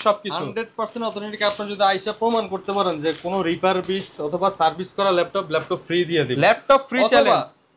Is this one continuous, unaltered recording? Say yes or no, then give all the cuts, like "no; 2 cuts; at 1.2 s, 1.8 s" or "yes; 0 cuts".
yes; 0 cuts